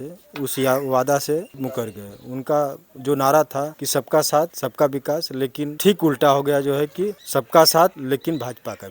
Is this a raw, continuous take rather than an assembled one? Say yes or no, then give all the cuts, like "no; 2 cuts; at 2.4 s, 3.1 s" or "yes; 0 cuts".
no; 6 cuts; at 1.5 s, 3.8 s, 4.6 s, 5.7 s, 7.2 s, 8.0 s